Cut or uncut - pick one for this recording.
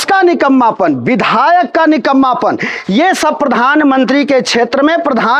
uncut